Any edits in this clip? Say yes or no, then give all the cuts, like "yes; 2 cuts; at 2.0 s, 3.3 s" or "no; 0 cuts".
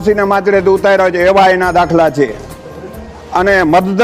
no; 0 cuts